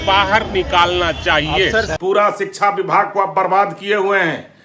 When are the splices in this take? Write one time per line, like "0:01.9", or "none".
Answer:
0:01.9